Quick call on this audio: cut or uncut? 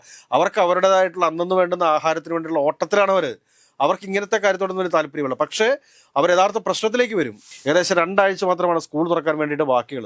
cut